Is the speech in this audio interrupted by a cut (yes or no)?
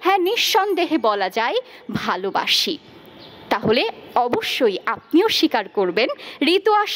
no